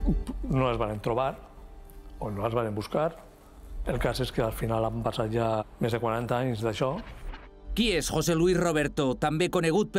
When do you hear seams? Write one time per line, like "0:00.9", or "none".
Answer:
none